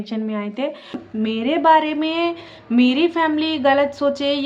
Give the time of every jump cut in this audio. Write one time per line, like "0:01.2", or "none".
0:01.0